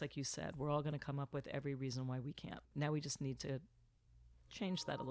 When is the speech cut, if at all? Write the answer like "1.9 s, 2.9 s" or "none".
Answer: 2.7 s